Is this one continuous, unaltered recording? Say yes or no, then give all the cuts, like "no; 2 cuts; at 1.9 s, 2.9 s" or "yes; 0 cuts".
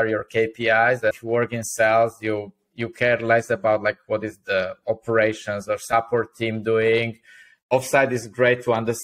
no; 2 cuts; at 1.2 s, 7.5 s